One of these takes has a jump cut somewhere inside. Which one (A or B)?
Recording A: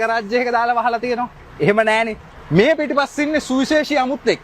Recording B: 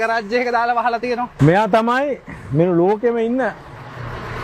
B